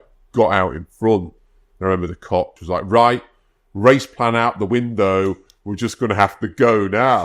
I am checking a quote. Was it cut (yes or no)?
yes